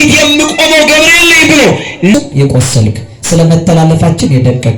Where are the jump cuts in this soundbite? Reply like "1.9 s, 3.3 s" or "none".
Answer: 2.1 s